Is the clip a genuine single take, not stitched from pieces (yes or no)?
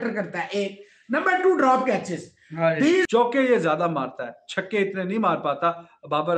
no